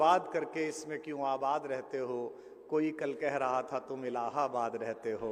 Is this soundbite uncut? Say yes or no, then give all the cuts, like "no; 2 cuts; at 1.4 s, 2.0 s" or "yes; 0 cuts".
yes; 0 cuts